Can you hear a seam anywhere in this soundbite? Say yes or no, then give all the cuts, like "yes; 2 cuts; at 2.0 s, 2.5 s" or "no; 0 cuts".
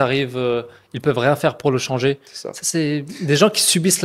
no; 0 cuts